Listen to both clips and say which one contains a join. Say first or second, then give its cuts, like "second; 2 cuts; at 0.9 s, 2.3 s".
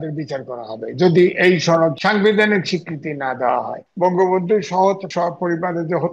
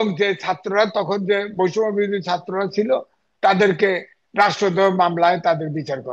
first; 3 cuts; at 2.0 s, 3.8 s, 5.1 s